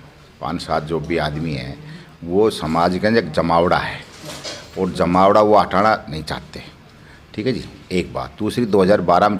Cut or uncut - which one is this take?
uncut